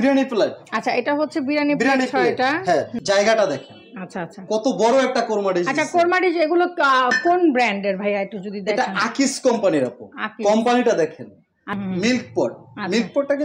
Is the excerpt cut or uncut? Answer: cut